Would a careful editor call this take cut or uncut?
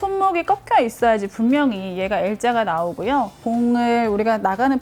cut